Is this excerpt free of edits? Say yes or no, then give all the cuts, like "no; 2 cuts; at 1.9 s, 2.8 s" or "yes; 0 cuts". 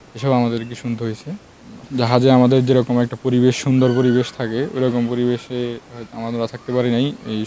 yes; 0 cuts